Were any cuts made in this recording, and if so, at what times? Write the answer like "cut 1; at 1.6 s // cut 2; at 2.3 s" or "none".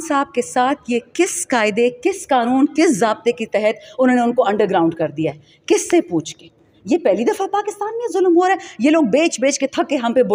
none